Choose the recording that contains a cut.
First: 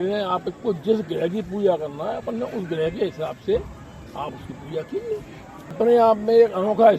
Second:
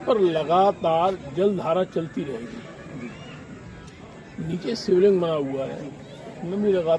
first; 1 cut; at 5.7 s

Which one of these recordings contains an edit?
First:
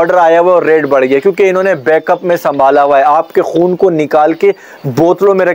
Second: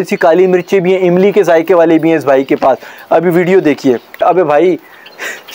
second; 1 cut; at 4.2 s

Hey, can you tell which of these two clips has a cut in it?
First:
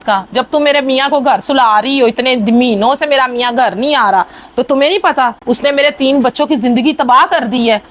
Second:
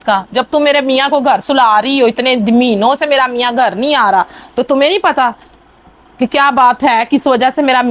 first; 1 cut; at 5.4 s

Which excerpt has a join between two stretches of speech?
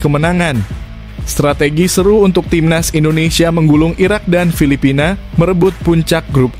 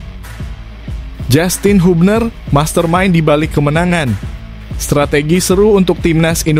second; 1 cut; at 1.3 s

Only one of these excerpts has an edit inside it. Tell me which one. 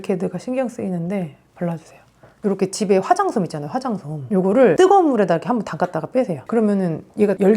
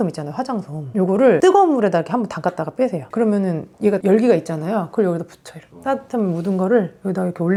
first; 1 cut; at 2.4 s

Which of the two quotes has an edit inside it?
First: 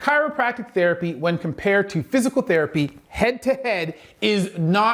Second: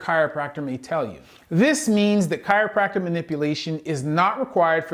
second; 1 cut; at 1.3 s

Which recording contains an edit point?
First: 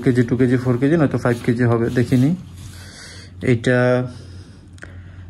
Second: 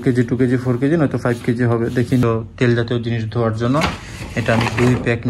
second; 1 cut; at 2.2 s

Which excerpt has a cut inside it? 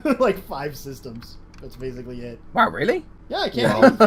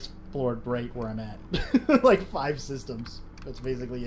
first; 1 cut; at 3.2 s

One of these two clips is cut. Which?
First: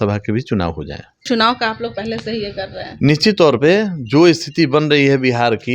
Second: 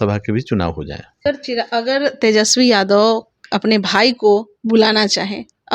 second; 1 cut; at 1.2 s

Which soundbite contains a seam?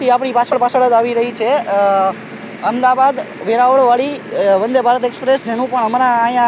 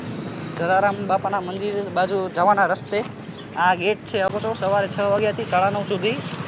second; 1 cut; at 4.3 s

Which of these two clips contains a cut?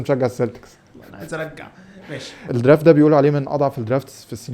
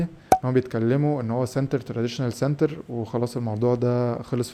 first; 1 cut; at 2.3 s

